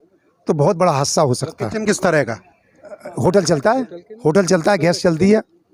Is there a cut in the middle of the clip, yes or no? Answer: no